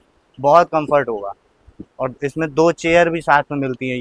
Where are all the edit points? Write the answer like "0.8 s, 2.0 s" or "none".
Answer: none